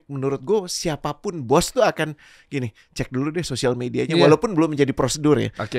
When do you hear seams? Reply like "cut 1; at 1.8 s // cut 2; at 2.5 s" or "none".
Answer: none